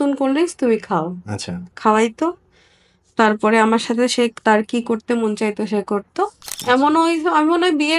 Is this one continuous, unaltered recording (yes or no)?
no